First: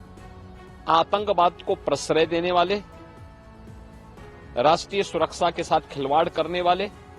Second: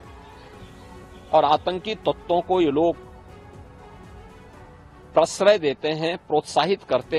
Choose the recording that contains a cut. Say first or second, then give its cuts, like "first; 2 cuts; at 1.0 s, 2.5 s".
first; 2 cuts; at 2.8 s, 4.5 s